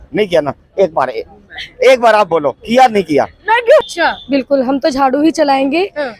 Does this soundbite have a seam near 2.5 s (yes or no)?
no